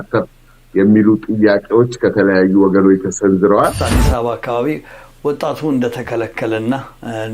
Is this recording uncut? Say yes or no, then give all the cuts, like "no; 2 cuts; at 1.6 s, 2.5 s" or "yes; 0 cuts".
no; 1 cut; at 3.8 s